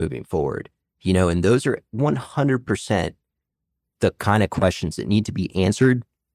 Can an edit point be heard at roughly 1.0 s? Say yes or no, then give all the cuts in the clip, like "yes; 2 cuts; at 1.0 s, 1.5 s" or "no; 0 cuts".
no; 0 cuts